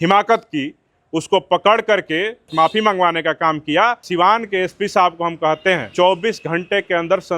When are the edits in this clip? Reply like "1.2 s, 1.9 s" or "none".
2.5 s, 4.0 s, 5.9 s

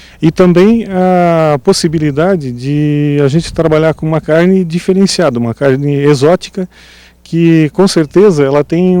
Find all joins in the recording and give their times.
0.9 s

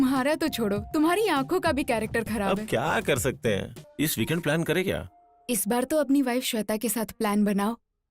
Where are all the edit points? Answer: 3.8 s

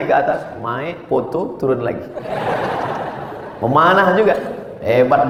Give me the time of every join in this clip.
none

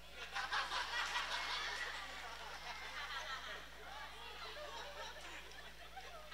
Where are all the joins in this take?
none

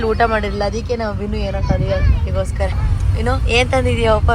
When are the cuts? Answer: none

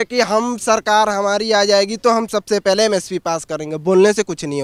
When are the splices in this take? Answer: none

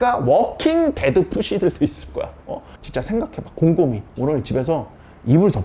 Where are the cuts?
2.7 s

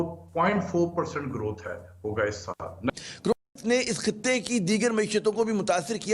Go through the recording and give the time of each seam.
2.9 s

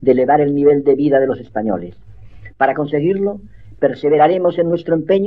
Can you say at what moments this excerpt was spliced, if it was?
4.0 s

